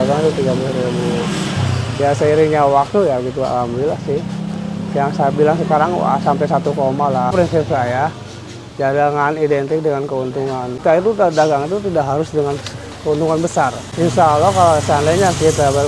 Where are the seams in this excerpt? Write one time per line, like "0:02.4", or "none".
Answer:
0:07.3
0:10.8
0:13.8